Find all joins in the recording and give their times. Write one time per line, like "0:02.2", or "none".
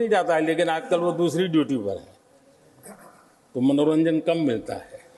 none